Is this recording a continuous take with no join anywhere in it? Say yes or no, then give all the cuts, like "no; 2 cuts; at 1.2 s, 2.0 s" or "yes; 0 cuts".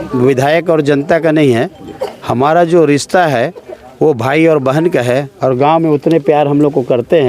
yes; 0 cuts